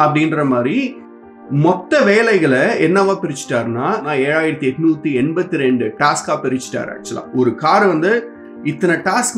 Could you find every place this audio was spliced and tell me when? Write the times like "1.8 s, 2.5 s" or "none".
1.0 s, 4.0 s